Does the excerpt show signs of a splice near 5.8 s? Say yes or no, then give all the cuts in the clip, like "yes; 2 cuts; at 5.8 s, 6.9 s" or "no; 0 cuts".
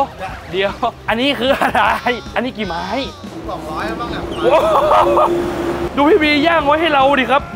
yes; 2 cuts; at 3.3 s, 5.8 s